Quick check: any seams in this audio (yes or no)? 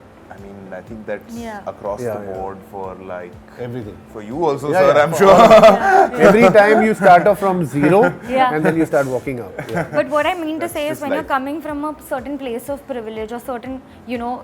no